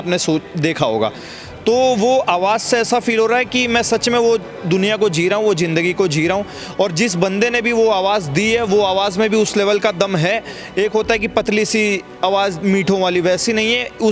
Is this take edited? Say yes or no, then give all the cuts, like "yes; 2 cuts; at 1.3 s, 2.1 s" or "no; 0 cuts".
no; 0 cuts